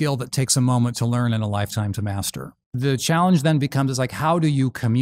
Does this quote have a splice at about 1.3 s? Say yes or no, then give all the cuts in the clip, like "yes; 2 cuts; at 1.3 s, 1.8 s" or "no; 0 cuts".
no; 1 cut; at 2.7 s